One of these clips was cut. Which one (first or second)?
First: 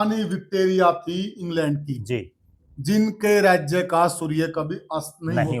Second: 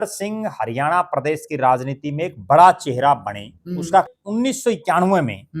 second